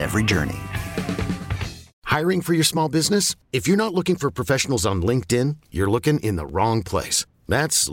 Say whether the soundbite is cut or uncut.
cut